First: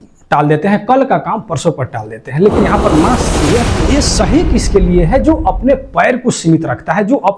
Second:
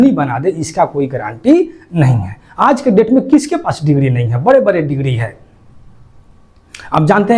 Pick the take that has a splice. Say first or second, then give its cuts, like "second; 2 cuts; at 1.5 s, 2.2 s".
first; 1 cut; at 3.8 s